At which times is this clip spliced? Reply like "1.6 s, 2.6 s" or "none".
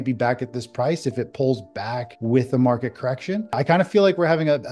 2.1 s, 3.6 s